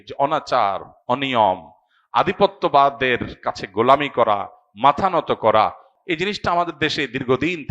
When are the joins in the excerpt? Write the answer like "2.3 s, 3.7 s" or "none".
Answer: 5.9 s